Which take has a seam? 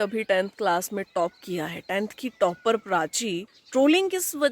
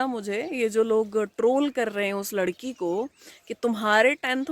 first; 1 cut; at 3.5 s

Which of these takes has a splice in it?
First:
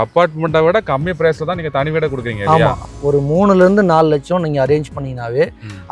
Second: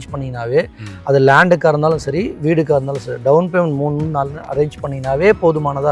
first; 1 cut; at 2.8 s

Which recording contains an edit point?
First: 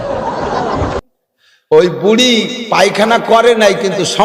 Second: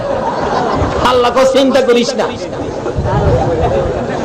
first; 1 cut; at 1.0 s

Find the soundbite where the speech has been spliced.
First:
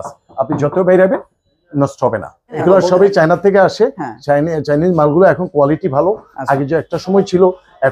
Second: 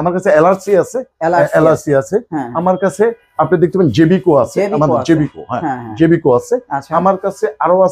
first; 1 cut; at 2.7 s

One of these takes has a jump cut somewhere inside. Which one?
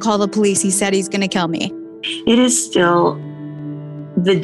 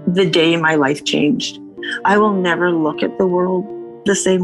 first; 1 cut; at 2.0 s

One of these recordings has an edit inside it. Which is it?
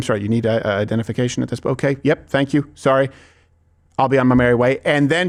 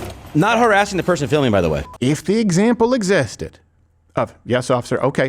second; 1 cut; at 1.9 s

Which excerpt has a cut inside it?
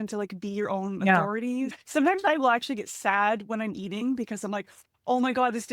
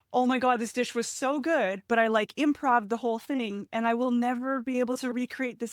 first; 1 cut; at 1.7 s

